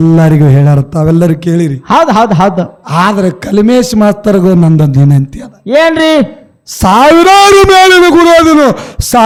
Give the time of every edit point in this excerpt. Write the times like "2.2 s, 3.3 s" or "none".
none